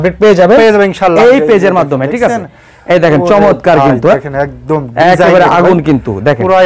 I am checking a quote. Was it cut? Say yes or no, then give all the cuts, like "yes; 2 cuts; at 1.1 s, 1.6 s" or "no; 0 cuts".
no; 0 cuts